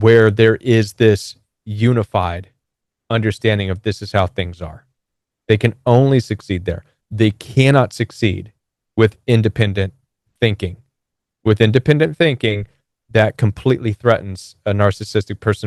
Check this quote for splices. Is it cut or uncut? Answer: uncut